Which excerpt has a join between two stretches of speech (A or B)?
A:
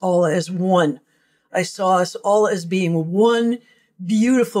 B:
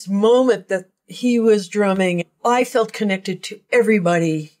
B